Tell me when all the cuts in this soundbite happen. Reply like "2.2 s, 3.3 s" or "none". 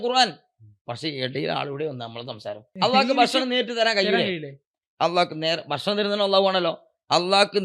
2.7 s